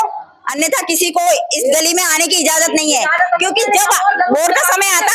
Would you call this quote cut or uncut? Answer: uncut